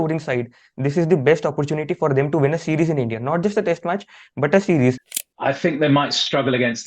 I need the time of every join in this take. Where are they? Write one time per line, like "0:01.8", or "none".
0:05.1